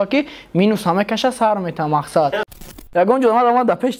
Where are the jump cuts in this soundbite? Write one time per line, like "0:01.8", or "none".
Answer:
0:02.6